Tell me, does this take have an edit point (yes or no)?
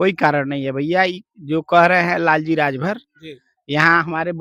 no